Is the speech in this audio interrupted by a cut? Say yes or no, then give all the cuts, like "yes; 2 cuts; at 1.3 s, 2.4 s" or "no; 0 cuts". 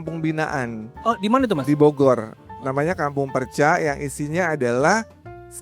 no; 0 cuts